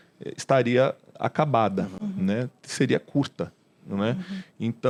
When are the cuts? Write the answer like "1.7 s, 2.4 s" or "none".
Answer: none

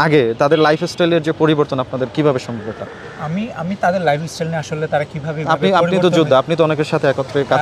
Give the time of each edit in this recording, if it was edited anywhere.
none

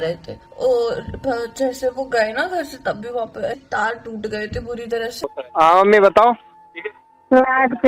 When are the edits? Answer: 5.4 s

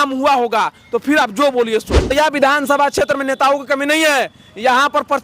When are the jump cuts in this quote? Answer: 2.1 s

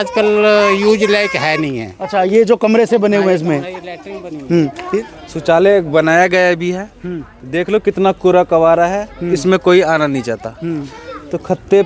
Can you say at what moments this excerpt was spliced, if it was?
5.0 s

